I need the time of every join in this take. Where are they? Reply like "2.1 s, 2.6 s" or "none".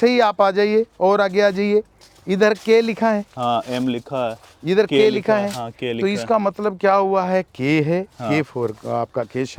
none